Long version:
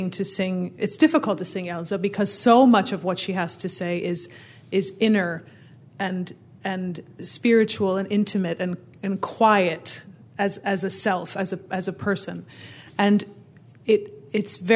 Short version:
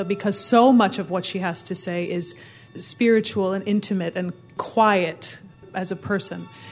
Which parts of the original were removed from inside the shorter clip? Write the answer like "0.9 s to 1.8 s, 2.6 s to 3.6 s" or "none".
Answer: 4.6 s to 7.1 s, 8.9 s to 9.1 s, 10.3 s to 11.6 s

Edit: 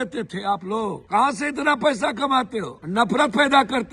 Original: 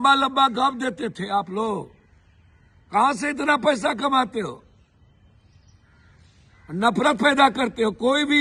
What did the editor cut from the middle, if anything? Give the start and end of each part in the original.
1.9 s to 2.8 s, 4.6 s to 6.6 s

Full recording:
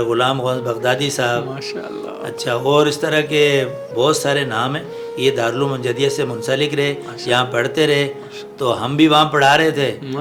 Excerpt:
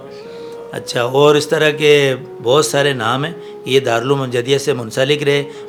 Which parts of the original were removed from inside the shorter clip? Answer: none

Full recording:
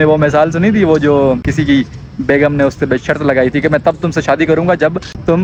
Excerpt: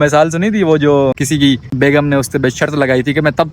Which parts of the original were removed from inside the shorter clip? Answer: 1.6 s to 1.9 s

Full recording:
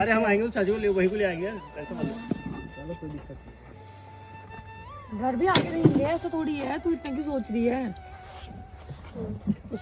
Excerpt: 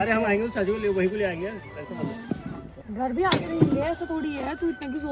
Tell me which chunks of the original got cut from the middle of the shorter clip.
2.7 s to 5.0 s

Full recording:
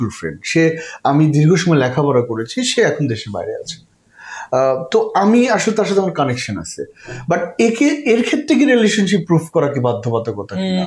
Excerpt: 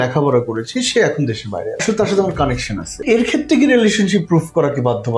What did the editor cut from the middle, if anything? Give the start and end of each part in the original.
3.6 s to 5.6 s, 6.8 s to 8.0 s

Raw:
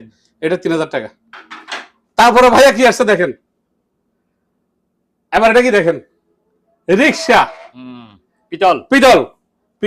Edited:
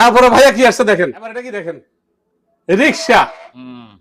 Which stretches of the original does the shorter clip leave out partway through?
3.5 s to 5.5 s

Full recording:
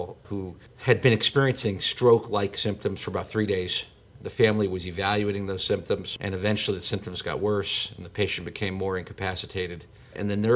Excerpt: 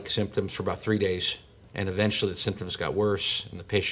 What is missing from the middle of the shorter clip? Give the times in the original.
4.2 s to 6.1 s

